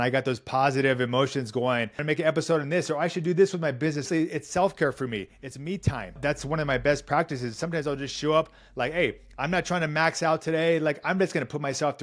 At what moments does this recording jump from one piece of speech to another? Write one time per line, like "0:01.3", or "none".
0:02.0
0:04.1
0:06.2